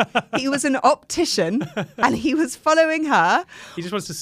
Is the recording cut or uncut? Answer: uncut